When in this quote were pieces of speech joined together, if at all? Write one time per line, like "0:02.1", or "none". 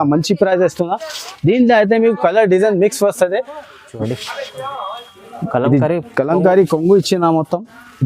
0:04.0